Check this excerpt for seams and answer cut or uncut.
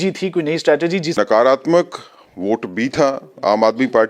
cut